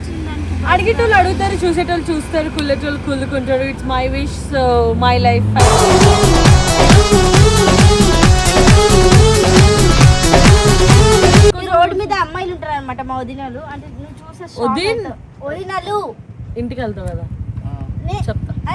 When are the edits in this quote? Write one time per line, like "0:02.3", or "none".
0:11.5